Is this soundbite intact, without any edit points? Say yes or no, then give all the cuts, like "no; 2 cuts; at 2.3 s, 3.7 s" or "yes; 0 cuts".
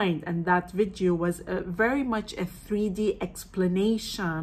yes; 0 cuts